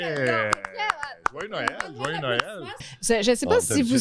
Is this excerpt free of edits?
no; 1 cut; at 2.8 s

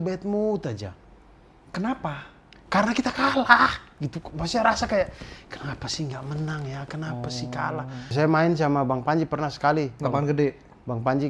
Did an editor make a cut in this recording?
yes; 1 cut; at 8.1 s

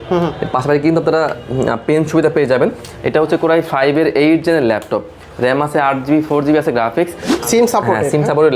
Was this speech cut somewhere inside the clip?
yes; 1 cut; at 7.3 s

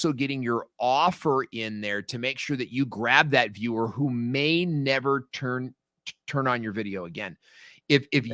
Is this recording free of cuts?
yes; 0 cuts

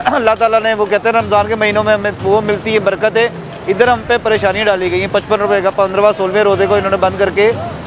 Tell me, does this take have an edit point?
no; 0 cuts

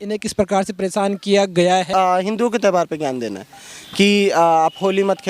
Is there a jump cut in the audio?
yes; 1 cut; at 1.9 s

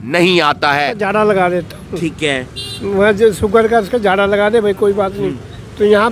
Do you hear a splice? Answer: yes; 1 cut; at 1.0 s

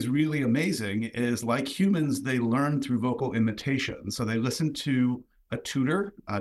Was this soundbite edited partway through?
no; 0 cuts

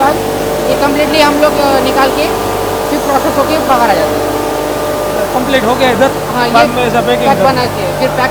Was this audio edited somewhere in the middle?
no; 0 cuts

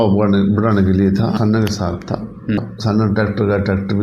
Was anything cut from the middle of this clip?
yes; 2 cuts; at 1.4 s, 2.6 s

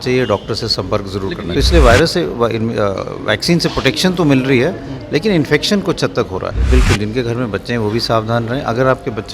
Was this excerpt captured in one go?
no; 2 cuts; at 1.4 s, 6.5 s

